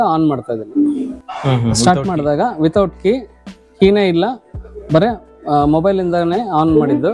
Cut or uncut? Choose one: cut